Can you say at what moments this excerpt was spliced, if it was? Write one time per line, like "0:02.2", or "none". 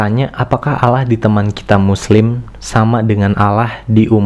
none